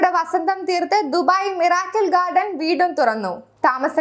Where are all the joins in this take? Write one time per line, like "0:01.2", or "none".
none